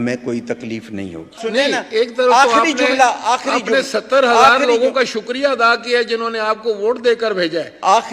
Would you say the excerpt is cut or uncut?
cut